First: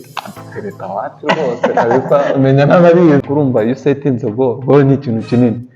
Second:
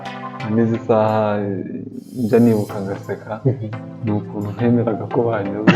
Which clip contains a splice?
first; 1 cut; at 3.2 s

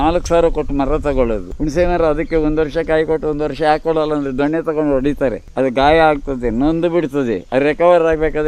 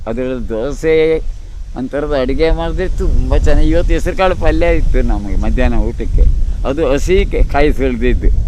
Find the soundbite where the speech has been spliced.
first; 2 cuts; at 1.5 s, 5.4 s

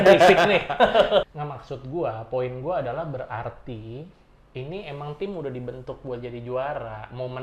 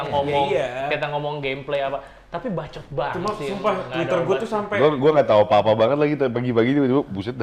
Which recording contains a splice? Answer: first; 1 cut; at 1.2 s

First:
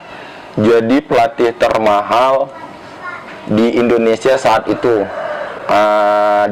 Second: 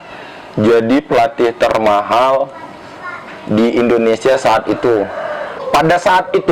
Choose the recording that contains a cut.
second; 1 cut; at 5.6 s

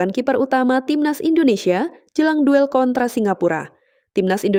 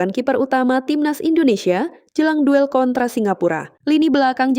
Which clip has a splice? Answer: second; 1 cut; at 3.7 s

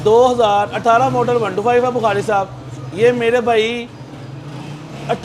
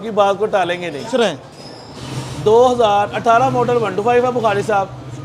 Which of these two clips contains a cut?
second; 1 cut; at 1.0 s

